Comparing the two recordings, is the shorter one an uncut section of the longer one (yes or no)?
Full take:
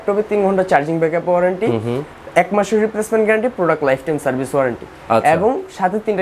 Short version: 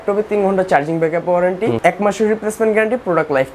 no